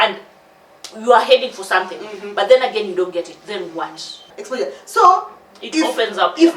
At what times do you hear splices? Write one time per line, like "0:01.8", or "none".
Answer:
0:04.4